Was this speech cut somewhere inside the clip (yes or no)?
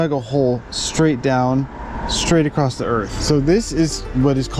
yes